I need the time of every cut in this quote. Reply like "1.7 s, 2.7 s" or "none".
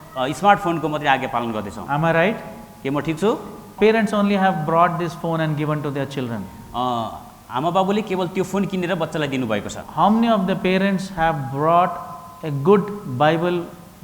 3.7 s, 9.8 s